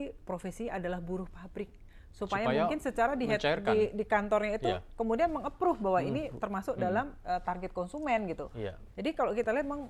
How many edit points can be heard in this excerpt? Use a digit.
1